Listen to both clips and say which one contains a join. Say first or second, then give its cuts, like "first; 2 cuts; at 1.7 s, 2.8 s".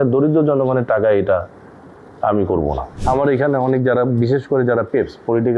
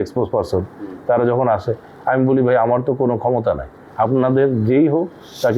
first; 1 cut; at 2.9 s